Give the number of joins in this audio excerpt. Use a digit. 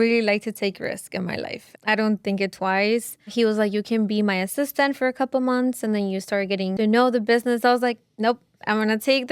2